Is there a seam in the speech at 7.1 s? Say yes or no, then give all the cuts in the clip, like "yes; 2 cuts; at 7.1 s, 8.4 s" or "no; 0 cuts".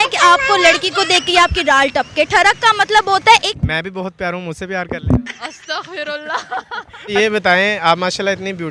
yes; 2 cuts; at 3.6 s, 7.1 s